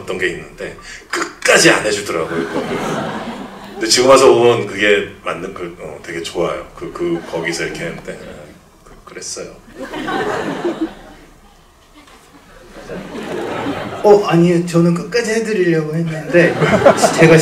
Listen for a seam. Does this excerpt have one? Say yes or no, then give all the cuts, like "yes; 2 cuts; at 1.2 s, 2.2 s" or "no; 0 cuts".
no; 0 cuts